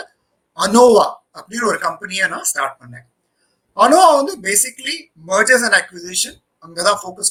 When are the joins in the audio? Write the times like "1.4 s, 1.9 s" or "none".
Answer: none

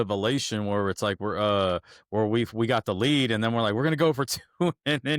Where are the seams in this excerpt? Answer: none

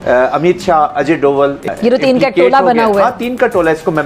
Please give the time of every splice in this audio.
1.7 s

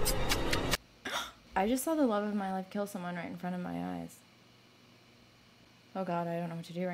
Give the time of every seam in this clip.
1.0 s, 5.7 s

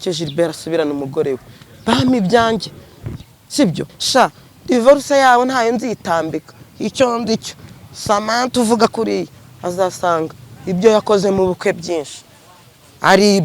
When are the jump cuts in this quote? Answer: 3.9 s

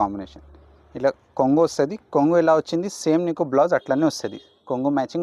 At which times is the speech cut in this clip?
none

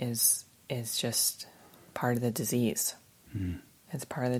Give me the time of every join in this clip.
none

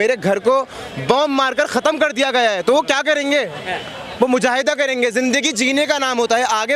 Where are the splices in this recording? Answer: none

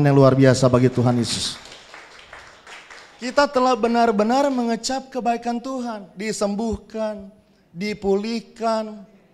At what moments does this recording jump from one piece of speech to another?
2.7 s

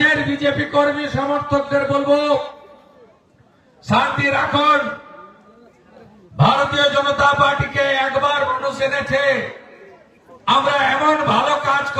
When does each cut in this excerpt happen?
none

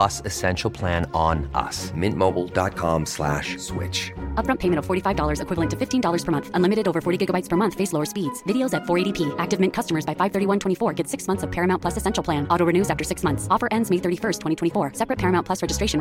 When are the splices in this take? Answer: none

